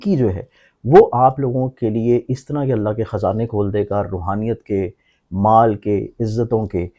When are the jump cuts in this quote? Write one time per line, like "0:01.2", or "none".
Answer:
none